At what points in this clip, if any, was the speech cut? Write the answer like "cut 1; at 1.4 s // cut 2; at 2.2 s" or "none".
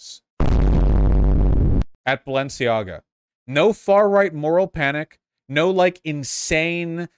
cut 1; at 1.9 s